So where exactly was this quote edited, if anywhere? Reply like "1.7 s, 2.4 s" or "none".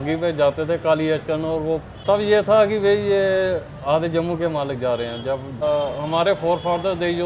1.9 s, 5.6 s